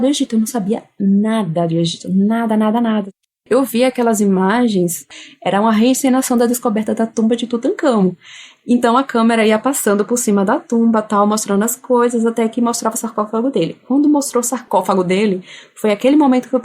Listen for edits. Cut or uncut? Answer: cut